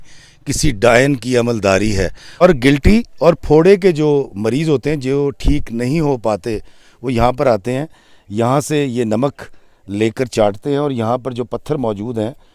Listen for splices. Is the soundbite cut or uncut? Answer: cut